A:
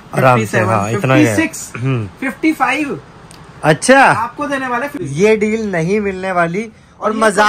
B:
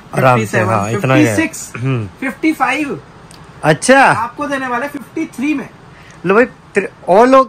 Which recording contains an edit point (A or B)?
A